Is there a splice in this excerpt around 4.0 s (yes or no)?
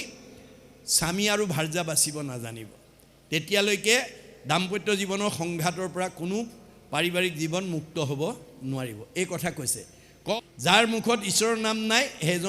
no